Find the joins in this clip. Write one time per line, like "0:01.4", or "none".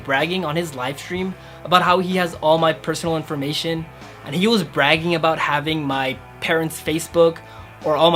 none